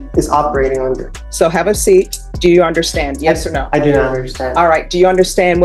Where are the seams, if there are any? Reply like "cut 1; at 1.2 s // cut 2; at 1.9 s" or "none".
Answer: cut 1; at 1.2 s // cut 2; at 2.2 s